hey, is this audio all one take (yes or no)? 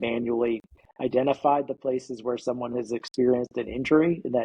yes